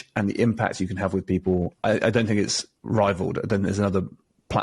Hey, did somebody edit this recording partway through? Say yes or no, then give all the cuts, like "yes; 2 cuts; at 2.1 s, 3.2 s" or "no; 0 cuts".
yes; 1 cut; at 1.7 s